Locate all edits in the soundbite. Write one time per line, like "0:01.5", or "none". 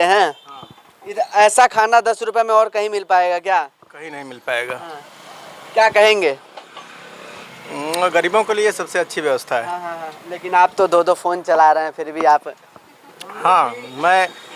none